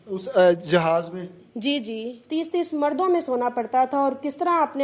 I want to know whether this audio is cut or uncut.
cut